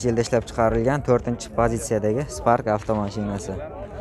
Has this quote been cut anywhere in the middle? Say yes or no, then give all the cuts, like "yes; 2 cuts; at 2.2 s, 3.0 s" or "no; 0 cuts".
no; 0 cuts